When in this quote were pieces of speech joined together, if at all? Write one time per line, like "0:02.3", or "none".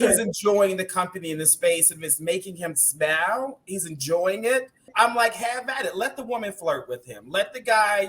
0:04.9